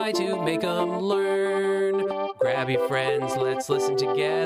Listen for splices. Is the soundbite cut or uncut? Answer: uncut